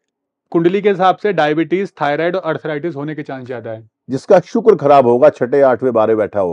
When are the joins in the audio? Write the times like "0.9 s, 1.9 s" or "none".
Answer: none

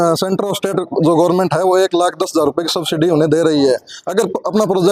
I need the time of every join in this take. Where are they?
none

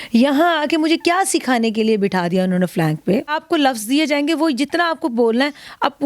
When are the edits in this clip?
3.4 s

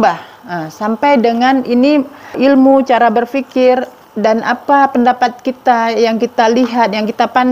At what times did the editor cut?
2.4 s

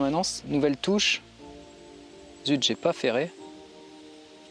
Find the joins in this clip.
none

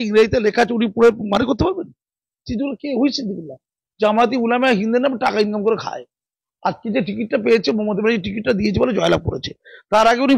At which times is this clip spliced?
none

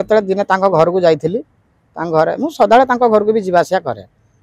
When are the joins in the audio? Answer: none

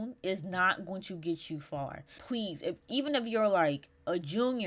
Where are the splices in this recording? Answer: 2.2 s

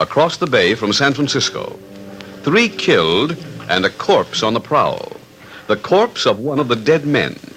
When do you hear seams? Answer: 4.3 s

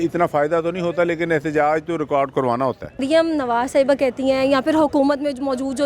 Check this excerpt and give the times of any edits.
3.0 s

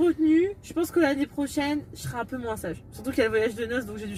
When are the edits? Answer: none

